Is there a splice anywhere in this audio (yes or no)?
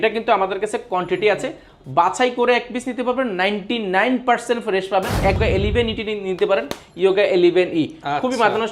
yes